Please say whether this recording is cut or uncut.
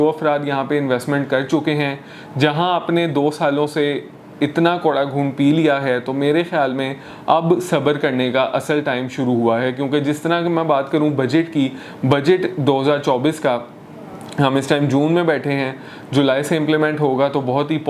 uncut